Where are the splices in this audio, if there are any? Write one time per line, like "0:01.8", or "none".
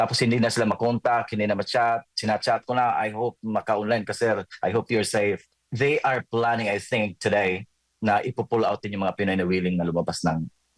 0:05.7